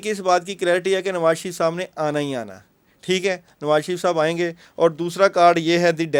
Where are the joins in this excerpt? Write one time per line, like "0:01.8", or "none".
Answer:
none